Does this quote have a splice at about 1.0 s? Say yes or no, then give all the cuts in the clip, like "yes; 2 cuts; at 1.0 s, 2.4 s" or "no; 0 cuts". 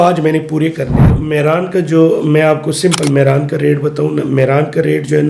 yes; 1 cut; at 1.0 s